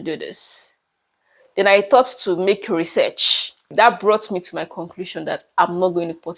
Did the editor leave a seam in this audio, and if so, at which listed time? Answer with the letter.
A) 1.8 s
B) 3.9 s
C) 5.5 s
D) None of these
D